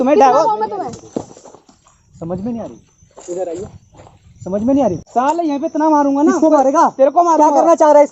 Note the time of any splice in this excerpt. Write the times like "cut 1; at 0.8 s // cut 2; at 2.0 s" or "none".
cut 1; at 5.0 s